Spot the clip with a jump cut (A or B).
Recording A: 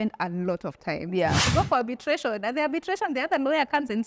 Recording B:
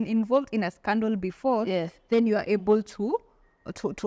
A